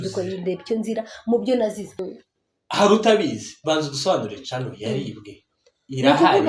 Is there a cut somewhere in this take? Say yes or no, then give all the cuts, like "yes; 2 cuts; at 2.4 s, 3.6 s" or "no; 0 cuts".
yes; 1 cut; at 2.1 s